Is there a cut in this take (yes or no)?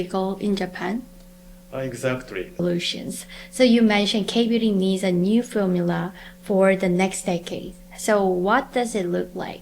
yes